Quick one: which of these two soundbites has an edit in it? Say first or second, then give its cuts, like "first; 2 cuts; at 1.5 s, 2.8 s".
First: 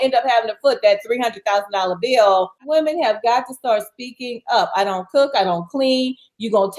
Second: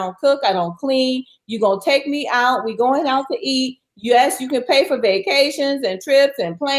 first; 1 cut; at 2.6 s